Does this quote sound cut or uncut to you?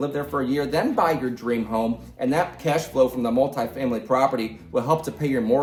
uncut